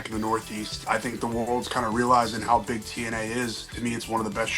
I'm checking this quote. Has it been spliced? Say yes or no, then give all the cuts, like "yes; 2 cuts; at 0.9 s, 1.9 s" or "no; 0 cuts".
yes; 2 cuts; at 0.8 s, 3.7 s